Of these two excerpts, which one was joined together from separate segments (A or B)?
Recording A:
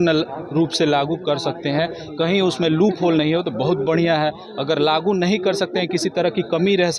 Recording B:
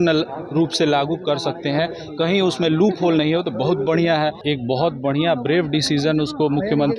B